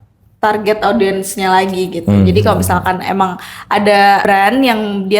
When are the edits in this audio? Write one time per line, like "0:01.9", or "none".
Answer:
0:04.2